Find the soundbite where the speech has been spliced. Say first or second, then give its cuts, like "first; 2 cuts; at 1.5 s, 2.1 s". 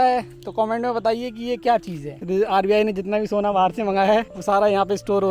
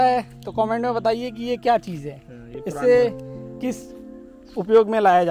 first; 2 cuts; at 2.2 s, 4.3 s